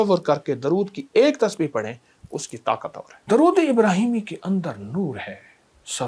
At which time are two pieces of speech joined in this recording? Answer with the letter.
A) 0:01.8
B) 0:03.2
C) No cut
B